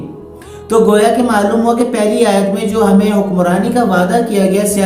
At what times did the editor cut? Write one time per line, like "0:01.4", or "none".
none